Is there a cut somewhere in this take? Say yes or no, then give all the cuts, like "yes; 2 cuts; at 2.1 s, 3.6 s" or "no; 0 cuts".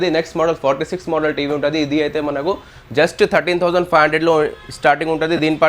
no; 0 cuts